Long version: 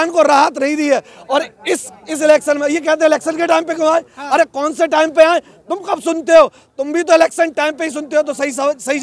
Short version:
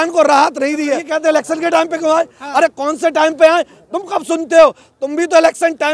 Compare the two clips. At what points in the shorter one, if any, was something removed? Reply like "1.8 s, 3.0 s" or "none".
1.0 s

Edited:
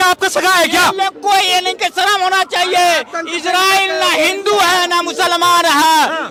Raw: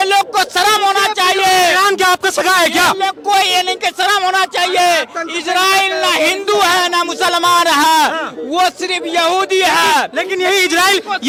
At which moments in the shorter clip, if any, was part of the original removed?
none

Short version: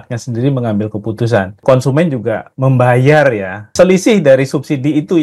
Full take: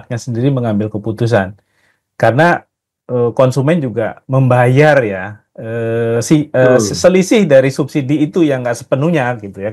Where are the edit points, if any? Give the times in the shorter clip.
1.6 s, 3.7 s

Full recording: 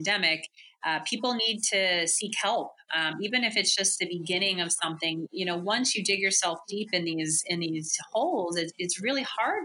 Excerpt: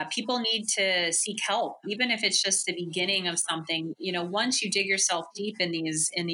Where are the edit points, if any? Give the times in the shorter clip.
1.8 s

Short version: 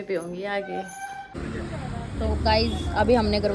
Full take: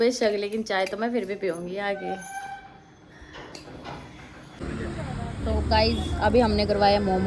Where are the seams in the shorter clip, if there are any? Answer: 1.3 s

